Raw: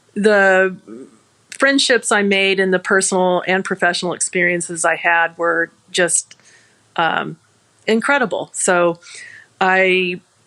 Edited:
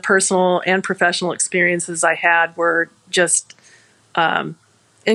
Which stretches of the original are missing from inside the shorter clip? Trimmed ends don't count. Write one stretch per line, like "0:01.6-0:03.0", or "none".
none